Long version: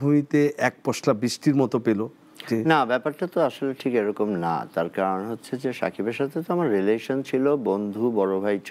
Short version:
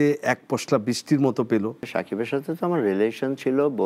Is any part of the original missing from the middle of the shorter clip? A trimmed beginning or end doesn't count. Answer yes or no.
yes